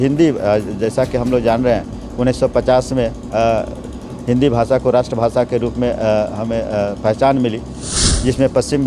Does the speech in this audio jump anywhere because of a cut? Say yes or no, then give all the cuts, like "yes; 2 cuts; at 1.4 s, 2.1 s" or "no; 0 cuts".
yes; 1 cut; at 8.0 s